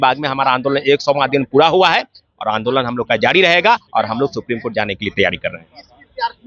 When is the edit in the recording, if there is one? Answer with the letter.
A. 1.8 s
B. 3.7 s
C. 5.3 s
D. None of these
D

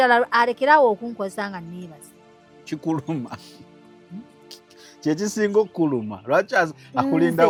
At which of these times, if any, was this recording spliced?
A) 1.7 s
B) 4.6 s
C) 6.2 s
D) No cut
D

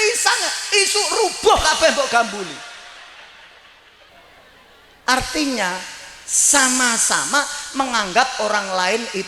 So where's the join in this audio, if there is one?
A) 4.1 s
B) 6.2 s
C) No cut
A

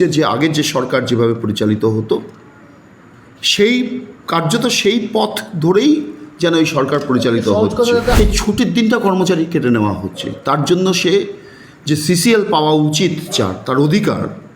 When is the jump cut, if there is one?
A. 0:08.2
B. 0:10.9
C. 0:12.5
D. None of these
A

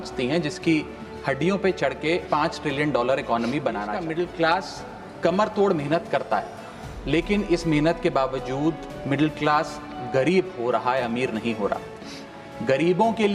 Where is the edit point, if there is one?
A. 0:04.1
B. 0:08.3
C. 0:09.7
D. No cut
A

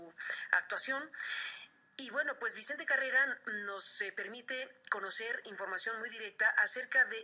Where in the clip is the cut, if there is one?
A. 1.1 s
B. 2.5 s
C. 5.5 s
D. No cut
B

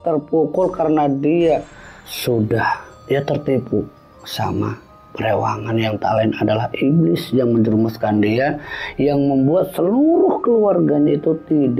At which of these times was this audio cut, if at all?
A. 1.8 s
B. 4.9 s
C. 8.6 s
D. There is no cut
D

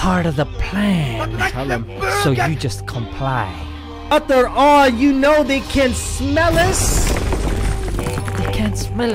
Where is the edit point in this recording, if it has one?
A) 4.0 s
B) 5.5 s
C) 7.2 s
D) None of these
A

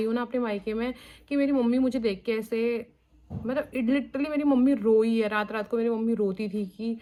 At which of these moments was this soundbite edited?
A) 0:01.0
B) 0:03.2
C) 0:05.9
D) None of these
D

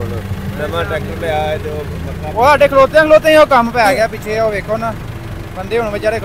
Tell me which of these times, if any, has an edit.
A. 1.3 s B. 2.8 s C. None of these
C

